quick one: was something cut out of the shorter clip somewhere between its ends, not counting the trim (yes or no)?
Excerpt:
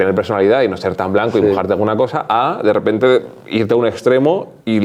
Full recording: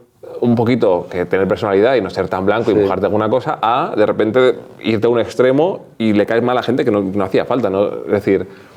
no